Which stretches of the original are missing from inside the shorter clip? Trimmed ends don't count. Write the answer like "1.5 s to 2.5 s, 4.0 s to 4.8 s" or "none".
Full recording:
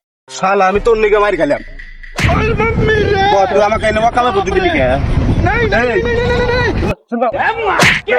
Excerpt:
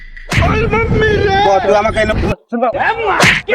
4.0 s to 6.7 s